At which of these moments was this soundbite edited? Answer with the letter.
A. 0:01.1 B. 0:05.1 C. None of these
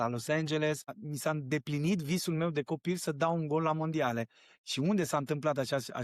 A